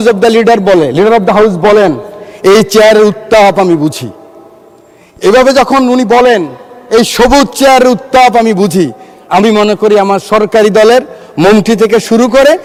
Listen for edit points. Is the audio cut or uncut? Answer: uncut